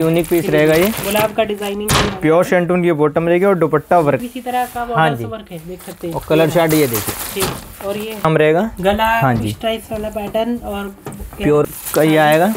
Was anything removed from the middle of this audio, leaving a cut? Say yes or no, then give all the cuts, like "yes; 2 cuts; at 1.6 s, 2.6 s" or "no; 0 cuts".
yes; 3 cuts; at 4.2 s, 8.2 s, 11.6 s